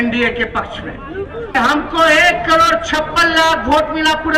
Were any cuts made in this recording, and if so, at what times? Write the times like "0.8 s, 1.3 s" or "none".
1.5 s